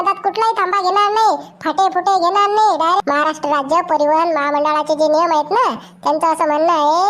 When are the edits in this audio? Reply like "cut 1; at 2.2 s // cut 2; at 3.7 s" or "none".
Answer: cut 1; at 3.0 s